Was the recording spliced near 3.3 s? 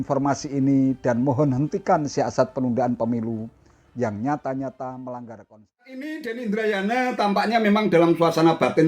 no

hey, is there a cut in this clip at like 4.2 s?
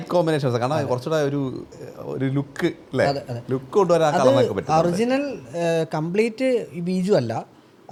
no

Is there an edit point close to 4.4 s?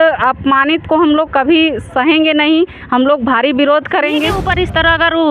yes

